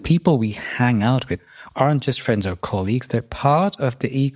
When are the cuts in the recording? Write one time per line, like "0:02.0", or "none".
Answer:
0:01.3